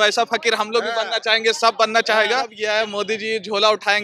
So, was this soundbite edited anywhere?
yes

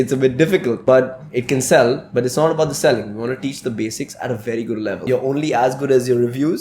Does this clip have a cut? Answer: yes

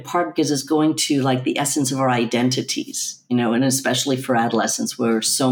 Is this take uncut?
yes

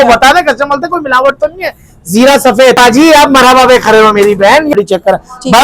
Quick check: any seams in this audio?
yes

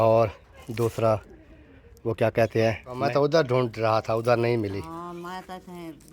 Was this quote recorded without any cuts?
no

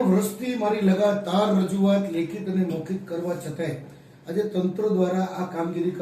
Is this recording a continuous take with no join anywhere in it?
yes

